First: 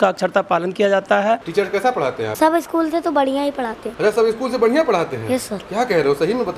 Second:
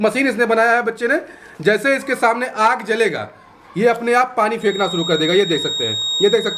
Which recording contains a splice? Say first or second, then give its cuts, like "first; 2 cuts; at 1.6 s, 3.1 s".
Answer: first; 3 cuts; at 1.5 s, 2.3 s, 3.8 s